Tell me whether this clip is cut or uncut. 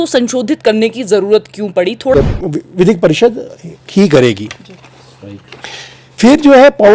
cut